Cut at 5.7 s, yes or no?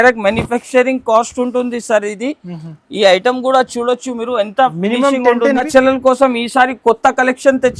yes